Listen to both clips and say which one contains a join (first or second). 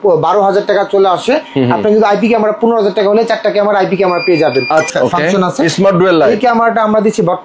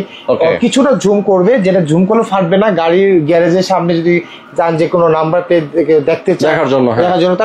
first